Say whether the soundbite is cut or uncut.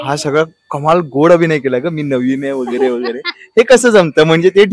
uncut